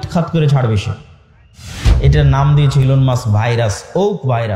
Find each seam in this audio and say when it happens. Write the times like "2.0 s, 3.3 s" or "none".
1.9 s

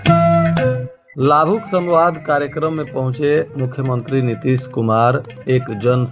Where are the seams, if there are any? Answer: 1.0 s

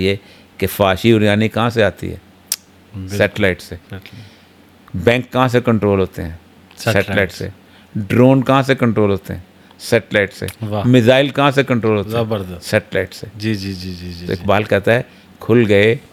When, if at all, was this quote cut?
none

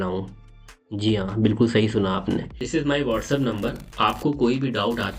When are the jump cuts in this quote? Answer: 2.6 s

